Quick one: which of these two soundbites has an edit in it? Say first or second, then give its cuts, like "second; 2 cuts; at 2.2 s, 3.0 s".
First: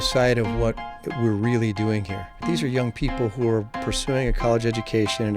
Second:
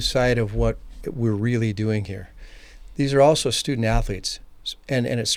first; 1 cut; at 2.4 s